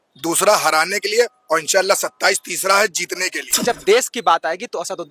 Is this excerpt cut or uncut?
cut